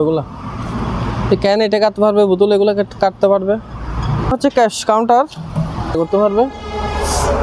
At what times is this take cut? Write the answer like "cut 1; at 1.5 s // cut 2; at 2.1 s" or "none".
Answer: cut 1; at 4.3 s // cut 2; at 6.0 s